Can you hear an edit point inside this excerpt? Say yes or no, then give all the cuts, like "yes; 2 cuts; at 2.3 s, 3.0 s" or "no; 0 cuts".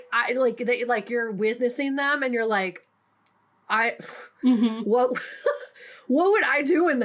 no; 0 cuts